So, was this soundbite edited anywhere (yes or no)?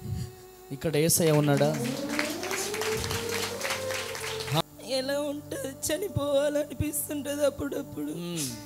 yes